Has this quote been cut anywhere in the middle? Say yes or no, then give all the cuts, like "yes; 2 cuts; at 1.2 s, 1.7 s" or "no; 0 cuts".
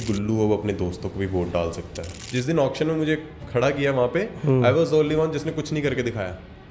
yes; 1 cut; at 2.2 s